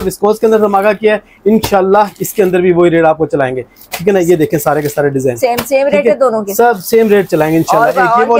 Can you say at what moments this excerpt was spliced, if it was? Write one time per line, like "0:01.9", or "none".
none